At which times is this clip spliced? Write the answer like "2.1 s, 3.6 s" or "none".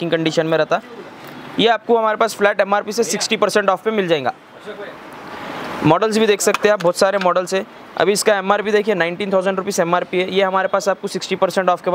none